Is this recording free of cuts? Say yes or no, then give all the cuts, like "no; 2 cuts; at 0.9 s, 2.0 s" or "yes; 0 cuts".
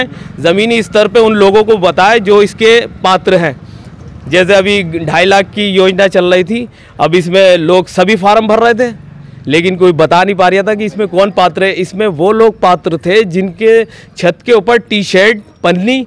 yes; 0 cuts